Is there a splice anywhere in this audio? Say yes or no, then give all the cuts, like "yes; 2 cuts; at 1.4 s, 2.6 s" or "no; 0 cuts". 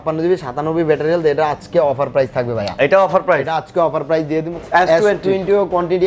yes; 1 cut; at 4.5 s